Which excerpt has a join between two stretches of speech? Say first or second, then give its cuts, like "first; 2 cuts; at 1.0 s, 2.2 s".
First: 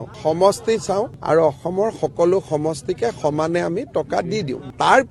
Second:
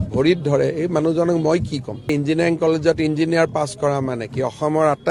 second; 1 cut; at 2.0 s